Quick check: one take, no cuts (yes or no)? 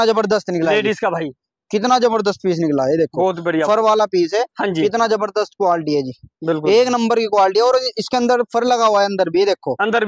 yes